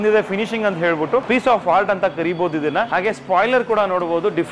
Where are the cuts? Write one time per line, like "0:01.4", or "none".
0:01.2
0:02.9